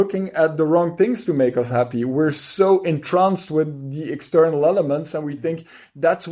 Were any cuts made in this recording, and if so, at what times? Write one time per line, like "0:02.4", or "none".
none